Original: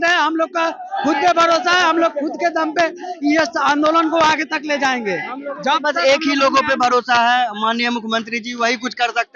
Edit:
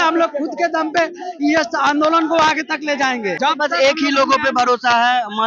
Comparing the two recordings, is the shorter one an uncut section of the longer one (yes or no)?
no